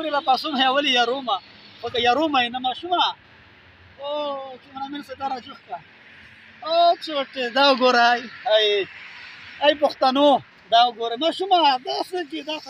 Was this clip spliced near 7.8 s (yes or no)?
no